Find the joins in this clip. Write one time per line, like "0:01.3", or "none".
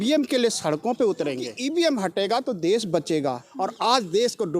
0:01.5
0:03.5